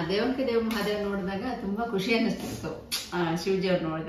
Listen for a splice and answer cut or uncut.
uncut